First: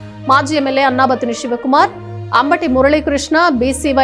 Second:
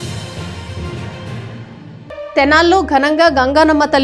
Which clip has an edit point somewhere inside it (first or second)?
second